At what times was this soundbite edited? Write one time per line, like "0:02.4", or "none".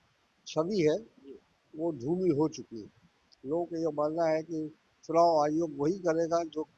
none